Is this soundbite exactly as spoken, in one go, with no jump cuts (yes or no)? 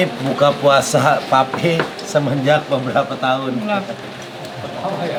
yes